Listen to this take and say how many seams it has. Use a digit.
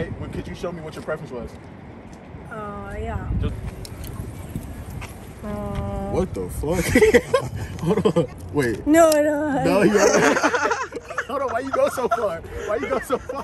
2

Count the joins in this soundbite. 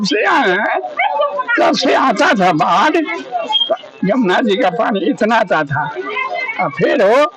0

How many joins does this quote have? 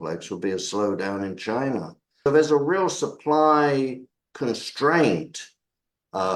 1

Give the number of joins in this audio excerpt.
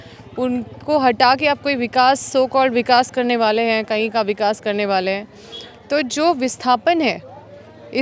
0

